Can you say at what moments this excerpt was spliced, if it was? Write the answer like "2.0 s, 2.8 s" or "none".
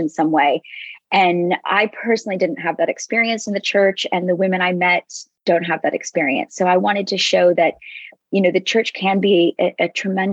none